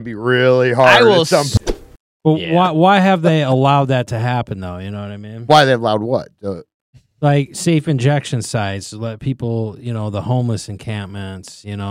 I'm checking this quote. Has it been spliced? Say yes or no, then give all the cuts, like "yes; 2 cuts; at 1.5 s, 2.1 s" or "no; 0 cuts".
yes; 1 cut; at 1.5 s